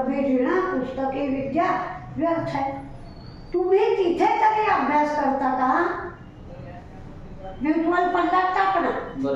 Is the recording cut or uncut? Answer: uncut